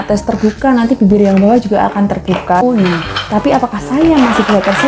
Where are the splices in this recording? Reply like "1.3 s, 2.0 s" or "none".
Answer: 2.6 s